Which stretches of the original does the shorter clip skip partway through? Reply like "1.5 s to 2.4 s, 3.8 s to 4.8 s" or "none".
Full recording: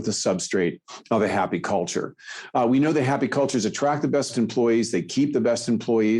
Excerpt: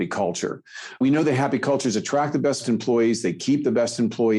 2.5 s to 2.7 s